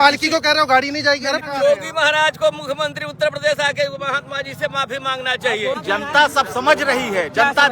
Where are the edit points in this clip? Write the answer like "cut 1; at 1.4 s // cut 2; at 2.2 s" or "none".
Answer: cut 1; at 1.4 s // cut 2; at 5.8 s

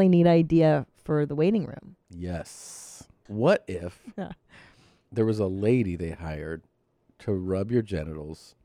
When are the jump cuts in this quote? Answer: cut 1; at 3.3 s

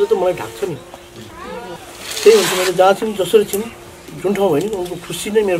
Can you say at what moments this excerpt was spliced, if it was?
cut 1; at 1.8 s

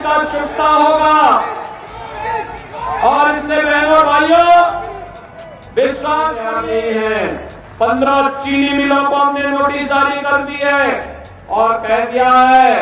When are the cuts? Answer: cut 1; at 6.5 s

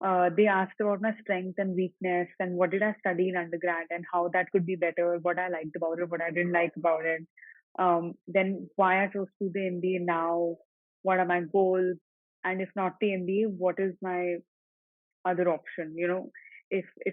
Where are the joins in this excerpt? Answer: none

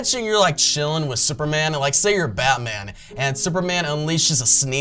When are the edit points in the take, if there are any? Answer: none

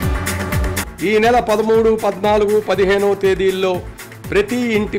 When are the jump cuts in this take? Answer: none

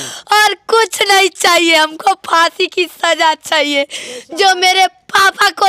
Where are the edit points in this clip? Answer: none

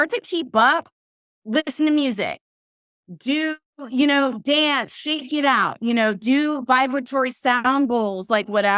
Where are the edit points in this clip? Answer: none

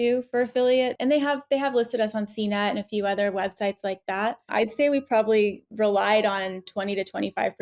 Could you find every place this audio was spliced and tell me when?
cut 1; at 1.0 s // cut 2; at 4.5 s // cut 3; at 5.6 s

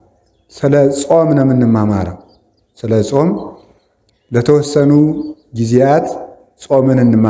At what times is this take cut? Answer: none

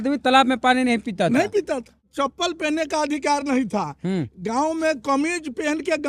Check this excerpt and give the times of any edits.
cut 1; at 2.1 s

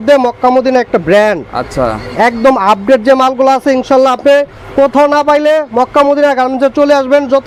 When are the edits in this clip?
none

